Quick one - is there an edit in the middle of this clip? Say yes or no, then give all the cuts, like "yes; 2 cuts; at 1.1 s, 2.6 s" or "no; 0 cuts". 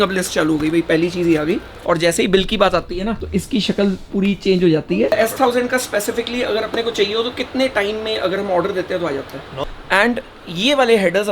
yes; 4 cuts; at 1.7 s, 3.2 s, 5.1 s, 9.5 s